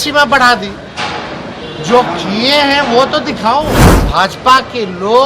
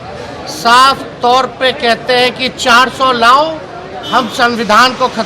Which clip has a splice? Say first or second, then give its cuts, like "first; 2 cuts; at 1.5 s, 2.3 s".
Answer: first; 1 cut; at 3.9 s